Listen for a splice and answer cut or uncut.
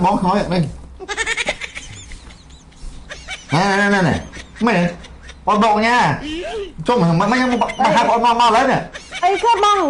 uncut